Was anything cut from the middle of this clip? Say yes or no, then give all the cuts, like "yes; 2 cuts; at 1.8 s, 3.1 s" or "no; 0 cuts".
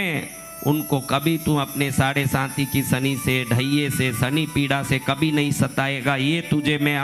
no; 0 cuts